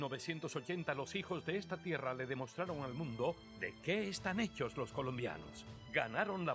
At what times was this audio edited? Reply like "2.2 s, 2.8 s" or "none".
4.2 s